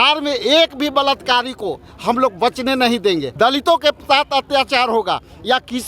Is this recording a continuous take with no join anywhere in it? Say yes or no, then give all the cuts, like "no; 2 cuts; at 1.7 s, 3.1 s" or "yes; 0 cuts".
no; 1 cut; at 3.3 s